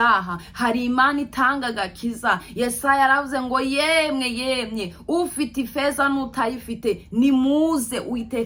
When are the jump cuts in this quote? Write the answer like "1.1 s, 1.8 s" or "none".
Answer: none

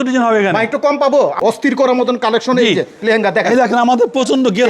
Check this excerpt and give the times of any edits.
1.4 s

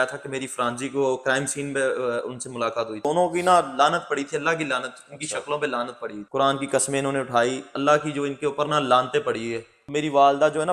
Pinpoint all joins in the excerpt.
3.0 s, 6.2 s, 9.7 s

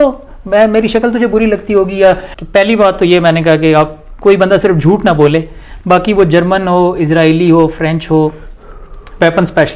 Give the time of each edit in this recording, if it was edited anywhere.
2.3 s

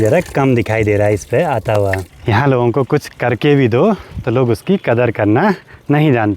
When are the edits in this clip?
2.1 s

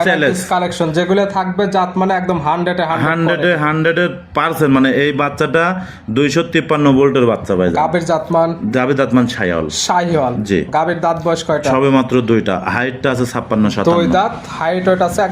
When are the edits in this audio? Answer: none

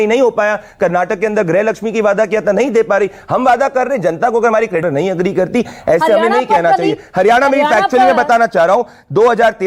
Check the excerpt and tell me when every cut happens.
none

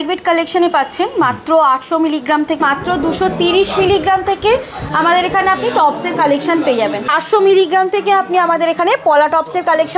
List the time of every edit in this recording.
2.6 s, 7.1 s

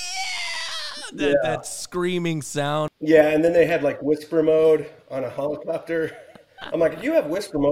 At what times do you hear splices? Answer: 2.9 s

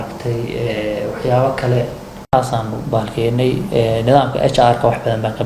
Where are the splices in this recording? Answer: 2.2 s

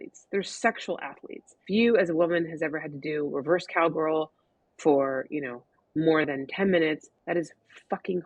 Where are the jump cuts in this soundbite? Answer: 1.6 s, 7.1 s

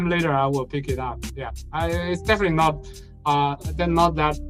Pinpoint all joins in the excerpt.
none

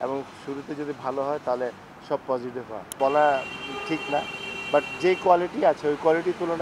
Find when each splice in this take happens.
2.8 s

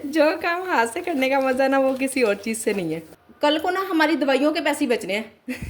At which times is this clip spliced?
3.1 s

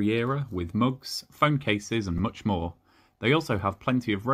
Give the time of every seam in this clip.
none

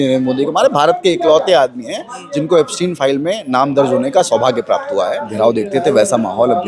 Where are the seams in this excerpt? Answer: 5.3 s

